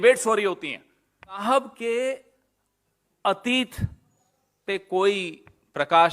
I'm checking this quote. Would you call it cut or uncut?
cut